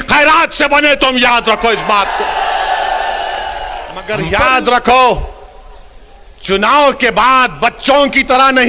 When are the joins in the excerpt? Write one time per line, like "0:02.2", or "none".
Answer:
0:04.2